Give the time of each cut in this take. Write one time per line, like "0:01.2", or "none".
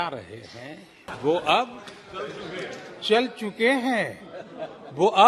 0:01.1